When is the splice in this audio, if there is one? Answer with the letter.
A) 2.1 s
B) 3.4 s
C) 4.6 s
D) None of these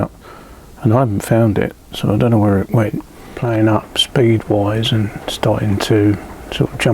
B